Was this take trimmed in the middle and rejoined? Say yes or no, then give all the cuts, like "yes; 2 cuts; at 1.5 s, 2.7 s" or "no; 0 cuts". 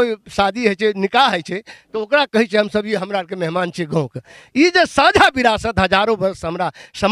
no; 0 cuts